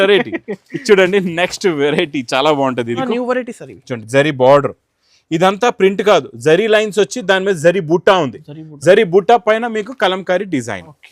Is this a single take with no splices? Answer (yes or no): no